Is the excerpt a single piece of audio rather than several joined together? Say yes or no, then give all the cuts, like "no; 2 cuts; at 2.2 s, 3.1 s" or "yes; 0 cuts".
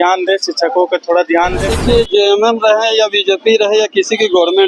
no; 1 cut; at 1.8 s